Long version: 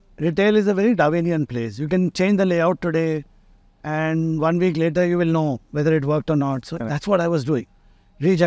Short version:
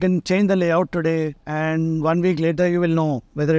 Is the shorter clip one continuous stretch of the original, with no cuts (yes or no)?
no